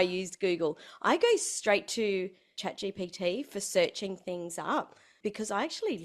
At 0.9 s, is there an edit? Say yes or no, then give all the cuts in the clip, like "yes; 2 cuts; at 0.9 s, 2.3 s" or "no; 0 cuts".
no; 2 cuts; at 2.6 s, 5.0 s